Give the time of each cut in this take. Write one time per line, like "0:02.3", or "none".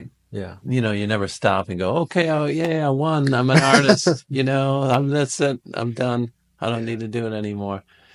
none